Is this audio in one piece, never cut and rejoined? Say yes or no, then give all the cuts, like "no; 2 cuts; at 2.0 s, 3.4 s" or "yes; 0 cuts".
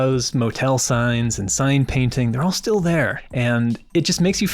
no; 1 cut; at 3.2 s